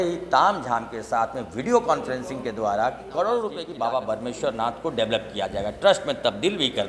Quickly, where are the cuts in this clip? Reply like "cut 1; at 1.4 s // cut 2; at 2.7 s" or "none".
cut 1; at 3.6 s